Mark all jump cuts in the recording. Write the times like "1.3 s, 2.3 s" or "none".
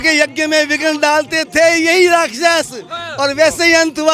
none